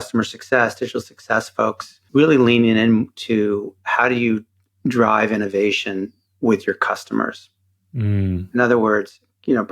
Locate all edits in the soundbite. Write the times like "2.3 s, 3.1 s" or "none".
1.9 s